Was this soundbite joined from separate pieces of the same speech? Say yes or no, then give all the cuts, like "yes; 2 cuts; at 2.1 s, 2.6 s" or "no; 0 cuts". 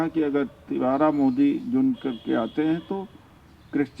no; 0 cuts